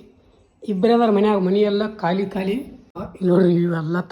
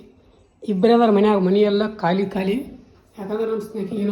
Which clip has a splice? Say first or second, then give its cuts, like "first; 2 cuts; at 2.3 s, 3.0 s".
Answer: first; 1 cut; at 3.0 s